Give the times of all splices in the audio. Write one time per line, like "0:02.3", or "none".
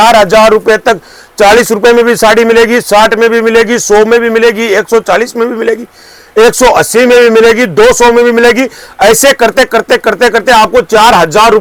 none